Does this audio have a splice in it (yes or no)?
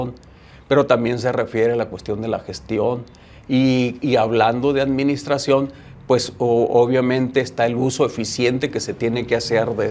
no